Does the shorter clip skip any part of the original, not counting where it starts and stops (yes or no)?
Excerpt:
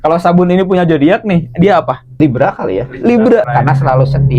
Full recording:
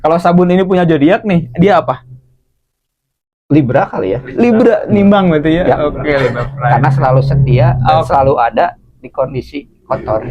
yes